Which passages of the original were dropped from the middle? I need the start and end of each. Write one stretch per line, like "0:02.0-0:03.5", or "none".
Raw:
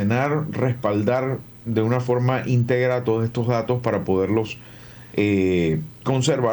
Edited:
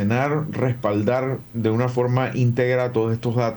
0:01.5-0:01.6

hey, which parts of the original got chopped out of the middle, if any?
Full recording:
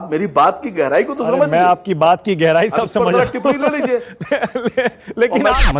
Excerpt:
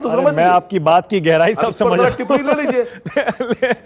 none

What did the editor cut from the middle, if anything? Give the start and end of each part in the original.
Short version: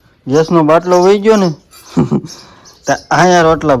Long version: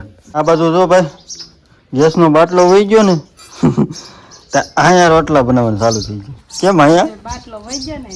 none

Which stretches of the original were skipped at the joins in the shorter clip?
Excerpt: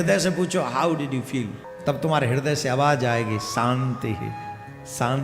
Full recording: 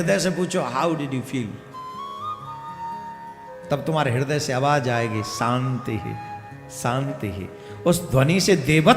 0:01.6-0:03.5

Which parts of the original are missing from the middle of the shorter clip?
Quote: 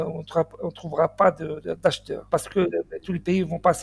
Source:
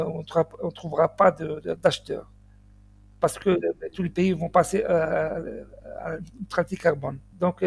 0:02.1-0:03.0

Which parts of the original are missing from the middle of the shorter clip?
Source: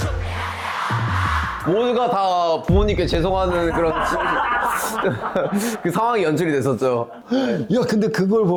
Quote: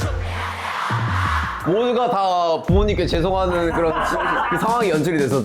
0:04.5-0:05.9

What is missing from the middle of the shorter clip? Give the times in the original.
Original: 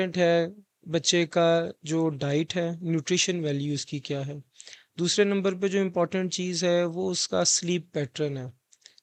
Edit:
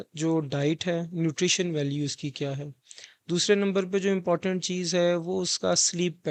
none

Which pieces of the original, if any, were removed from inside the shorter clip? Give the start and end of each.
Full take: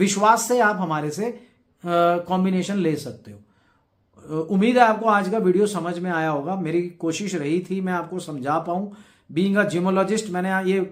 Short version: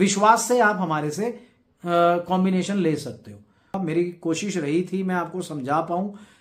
0:03.7-0:06.5

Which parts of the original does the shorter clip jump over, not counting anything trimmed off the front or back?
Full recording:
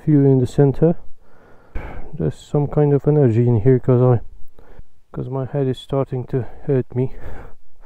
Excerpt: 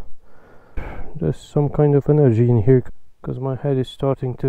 0:03.8-0:04.7

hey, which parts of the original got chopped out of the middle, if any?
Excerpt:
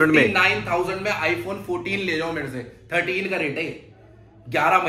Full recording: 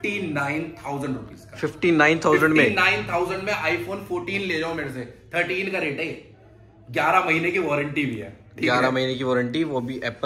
none

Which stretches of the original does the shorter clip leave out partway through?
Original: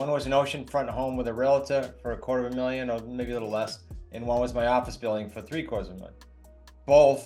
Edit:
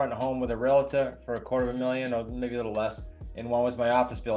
none

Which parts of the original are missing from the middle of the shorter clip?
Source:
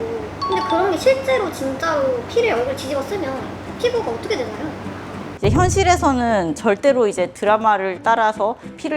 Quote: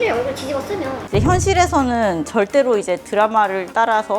0:03.4-0:05.3

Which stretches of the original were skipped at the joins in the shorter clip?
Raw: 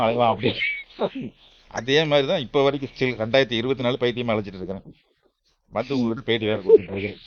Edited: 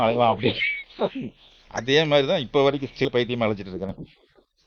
0:03.1-0:03.9

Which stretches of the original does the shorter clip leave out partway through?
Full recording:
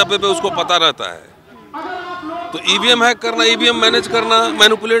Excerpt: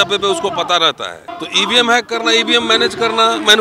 0:01.3-0:02.5

